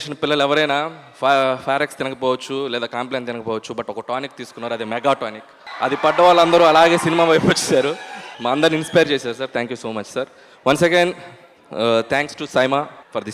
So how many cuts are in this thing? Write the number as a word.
zero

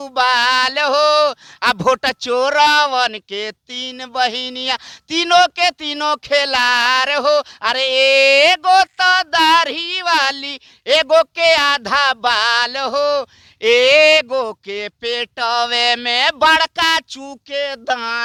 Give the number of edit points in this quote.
zero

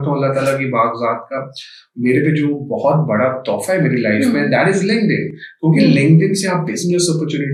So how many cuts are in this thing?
zero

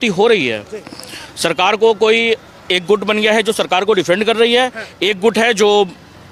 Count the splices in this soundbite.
zero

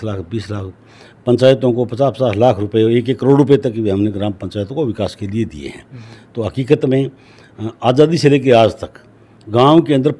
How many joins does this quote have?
zero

